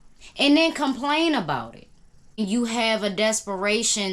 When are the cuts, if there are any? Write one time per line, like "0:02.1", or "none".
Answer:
0:02.4